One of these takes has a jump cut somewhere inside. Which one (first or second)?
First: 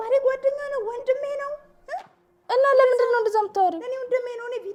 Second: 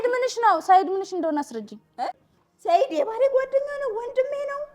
second